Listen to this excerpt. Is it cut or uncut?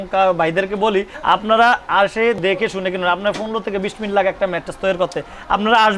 cut